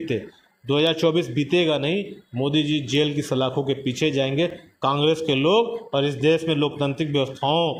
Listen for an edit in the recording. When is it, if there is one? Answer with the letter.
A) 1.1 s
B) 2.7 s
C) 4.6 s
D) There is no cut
D